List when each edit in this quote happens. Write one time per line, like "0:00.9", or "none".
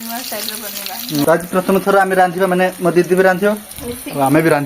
0:01.2